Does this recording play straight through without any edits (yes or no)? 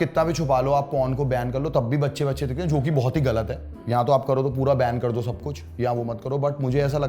yes